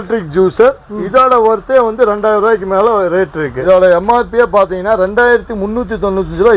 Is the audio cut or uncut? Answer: uncut